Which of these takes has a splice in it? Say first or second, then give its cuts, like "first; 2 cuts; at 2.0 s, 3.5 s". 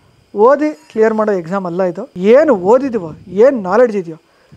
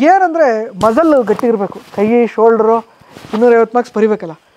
first; 1 cut; at 2.1 s